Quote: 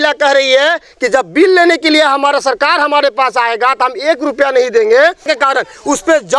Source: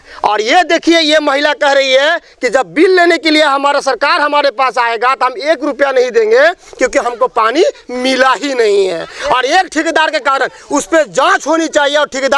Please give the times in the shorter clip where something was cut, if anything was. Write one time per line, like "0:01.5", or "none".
0:05.3